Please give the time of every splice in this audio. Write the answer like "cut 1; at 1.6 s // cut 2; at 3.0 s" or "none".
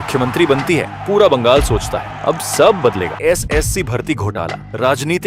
cut 1; at 3.2 s